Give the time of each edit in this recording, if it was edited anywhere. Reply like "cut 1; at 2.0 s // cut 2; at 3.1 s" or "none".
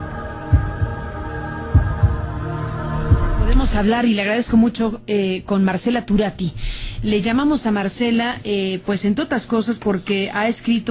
cut 1; at 1.2 s